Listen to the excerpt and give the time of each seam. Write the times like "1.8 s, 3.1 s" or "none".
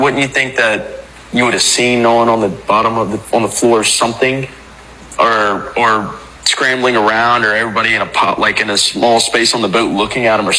none